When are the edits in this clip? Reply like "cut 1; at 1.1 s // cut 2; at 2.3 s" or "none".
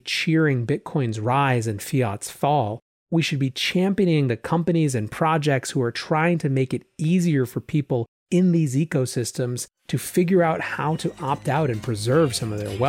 none